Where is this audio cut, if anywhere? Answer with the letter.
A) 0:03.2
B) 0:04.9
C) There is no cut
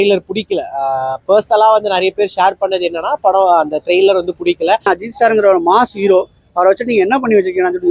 B